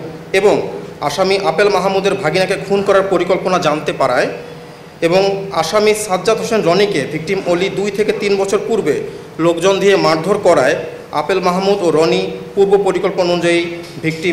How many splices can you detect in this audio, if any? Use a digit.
0